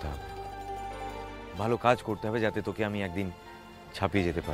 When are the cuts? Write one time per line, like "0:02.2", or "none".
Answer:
0:01.5